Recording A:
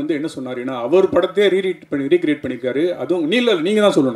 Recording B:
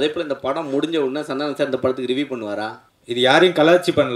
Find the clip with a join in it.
B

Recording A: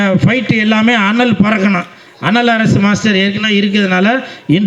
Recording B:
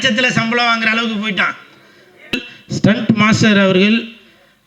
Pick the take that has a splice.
B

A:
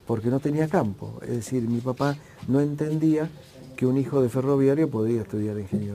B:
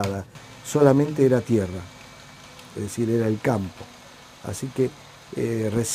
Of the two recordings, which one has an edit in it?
A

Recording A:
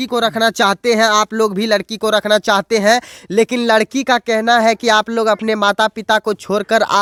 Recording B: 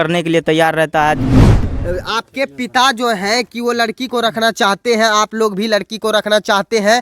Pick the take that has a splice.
B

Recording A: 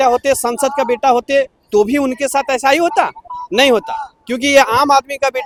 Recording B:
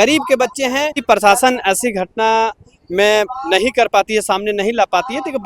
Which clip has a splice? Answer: B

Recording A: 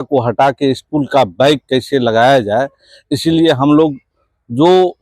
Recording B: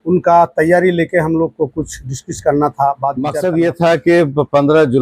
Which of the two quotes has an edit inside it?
B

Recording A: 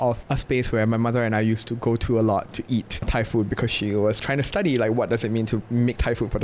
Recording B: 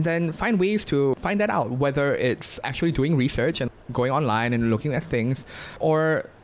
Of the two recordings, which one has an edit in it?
B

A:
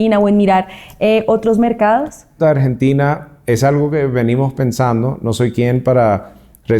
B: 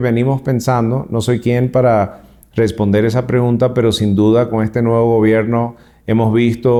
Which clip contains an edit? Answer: A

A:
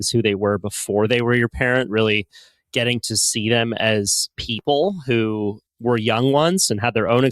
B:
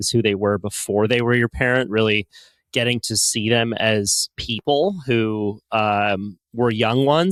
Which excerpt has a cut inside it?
A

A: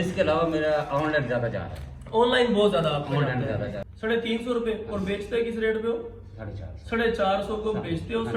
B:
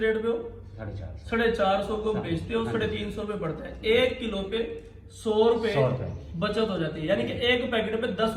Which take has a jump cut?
A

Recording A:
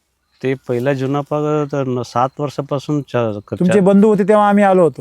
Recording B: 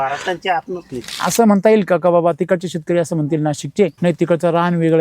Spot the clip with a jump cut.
B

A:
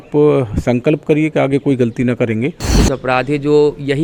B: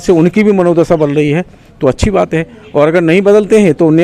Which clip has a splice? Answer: A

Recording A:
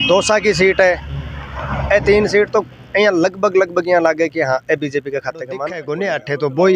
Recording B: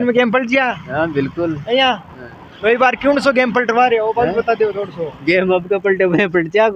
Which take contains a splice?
A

